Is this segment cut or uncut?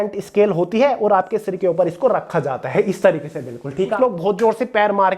cut